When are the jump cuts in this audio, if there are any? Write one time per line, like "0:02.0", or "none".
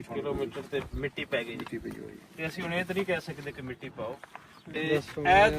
0:04.6